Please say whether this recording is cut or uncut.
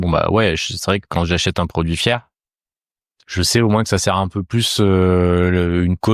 uncut